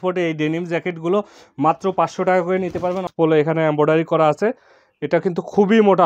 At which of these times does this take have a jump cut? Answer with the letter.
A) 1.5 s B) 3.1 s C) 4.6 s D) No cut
B